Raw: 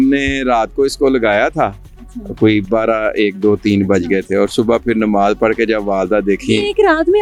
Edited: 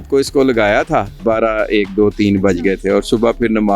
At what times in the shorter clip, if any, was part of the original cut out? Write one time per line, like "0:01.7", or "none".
0:01.2